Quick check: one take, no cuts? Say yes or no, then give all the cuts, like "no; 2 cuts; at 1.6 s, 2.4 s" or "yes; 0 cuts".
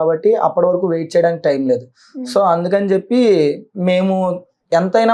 yes; 0 cuts